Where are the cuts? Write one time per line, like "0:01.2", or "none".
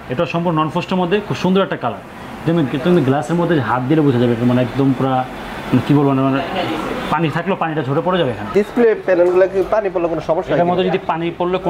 0:08.5

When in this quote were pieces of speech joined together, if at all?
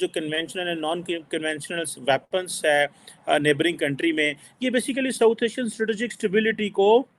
none

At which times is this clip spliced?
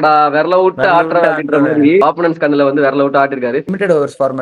0:02.0
0:03.7

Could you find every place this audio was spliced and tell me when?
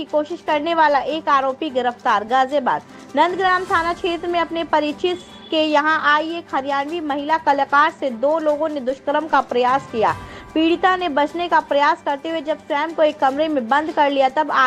none

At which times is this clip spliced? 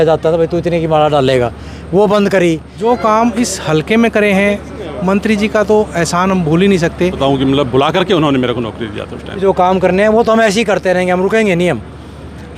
0:02.7
0:07.2
0:09.4

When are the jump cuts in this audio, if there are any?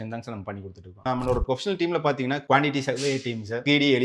0:01.0
0:02.4

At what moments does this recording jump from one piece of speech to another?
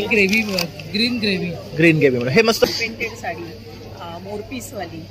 0:02.6

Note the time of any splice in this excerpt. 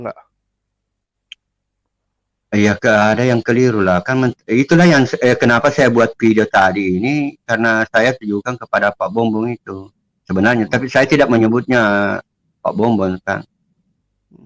none

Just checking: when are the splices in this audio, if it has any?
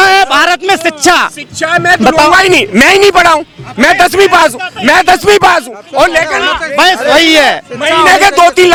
none

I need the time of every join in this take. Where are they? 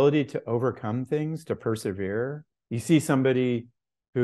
0:02.5

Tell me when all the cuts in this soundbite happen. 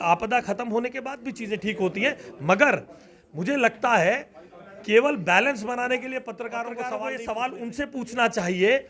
0:07.0

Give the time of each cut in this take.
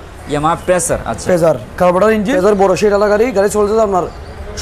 0:02.3

